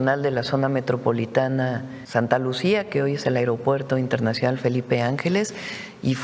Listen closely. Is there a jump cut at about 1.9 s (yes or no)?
yes